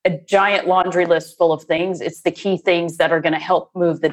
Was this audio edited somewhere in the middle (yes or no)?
yes